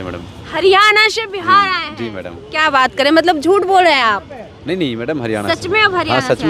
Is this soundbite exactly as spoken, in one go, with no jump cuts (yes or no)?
yes